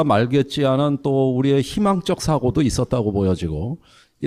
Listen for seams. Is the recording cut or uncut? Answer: uncut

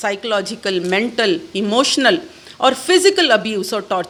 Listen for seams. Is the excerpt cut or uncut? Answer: uncut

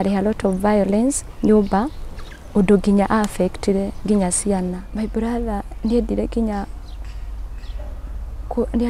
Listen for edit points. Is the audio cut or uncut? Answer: cut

